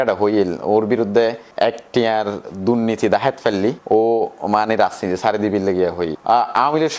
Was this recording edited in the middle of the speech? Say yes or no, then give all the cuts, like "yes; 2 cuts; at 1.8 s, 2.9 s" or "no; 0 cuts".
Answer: yes; 2 cuts; at 1.4 s, 6.1 s